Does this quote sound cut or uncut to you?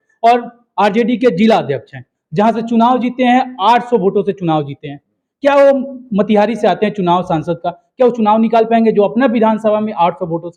uncut